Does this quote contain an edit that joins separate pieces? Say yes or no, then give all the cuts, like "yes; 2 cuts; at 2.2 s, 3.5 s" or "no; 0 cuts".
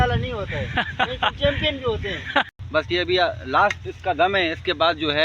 yes; 1 cut; at 2.5 s